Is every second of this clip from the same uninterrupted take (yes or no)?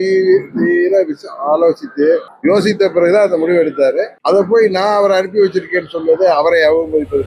yes